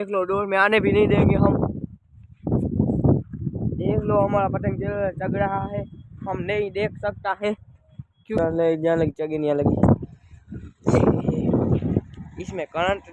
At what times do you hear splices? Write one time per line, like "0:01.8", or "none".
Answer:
0:08.4